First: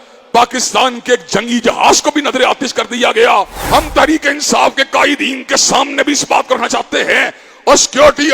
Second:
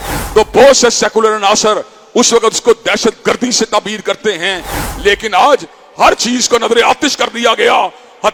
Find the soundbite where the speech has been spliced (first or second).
first